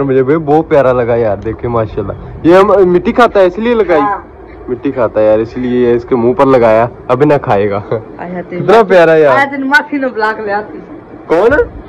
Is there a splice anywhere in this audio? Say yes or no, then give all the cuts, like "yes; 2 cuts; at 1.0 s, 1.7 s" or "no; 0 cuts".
no; 0 cuts